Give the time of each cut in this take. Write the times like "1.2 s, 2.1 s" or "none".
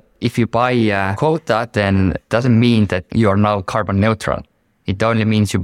1.1 s